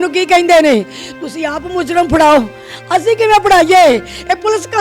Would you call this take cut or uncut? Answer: uncut